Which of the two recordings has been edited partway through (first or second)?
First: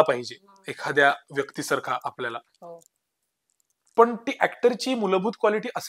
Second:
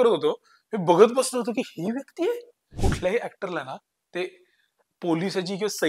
second